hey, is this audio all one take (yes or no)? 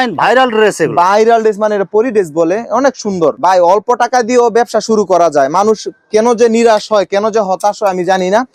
yes